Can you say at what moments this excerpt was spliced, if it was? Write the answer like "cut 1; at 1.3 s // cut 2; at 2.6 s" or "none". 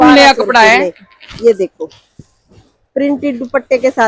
none